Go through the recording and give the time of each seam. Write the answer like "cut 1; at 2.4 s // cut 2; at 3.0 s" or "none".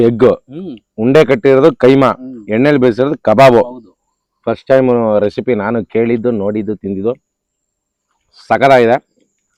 none